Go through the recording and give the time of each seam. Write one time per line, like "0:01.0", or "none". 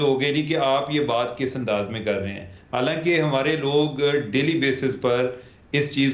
none